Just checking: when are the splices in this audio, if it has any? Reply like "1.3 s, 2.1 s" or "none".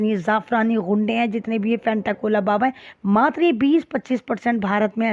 none